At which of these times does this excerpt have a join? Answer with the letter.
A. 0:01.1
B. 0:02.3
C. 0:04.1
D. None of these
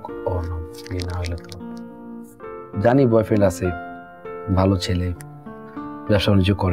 B